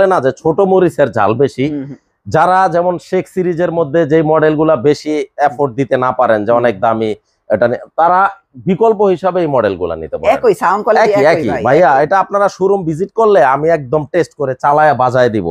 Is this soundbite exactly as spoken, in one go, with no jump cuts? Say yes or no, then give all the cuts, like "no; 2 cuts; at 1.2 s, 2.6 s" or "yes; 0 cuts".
yes; 0 cuts